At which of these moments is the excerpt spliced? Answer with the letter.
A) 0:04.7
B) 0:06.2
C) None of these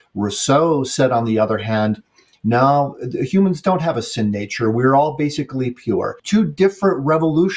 B